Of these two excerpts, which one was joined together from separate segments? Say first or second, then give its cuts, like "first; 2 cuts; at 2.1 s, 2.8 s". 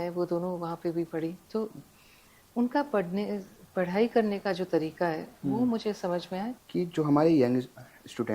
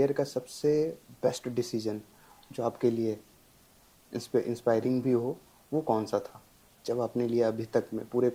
first; 1 cut; at 6.5 s